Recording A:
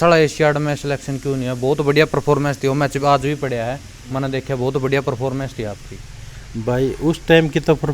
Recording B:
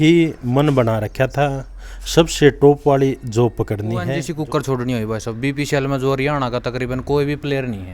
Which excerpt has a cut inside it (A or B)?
B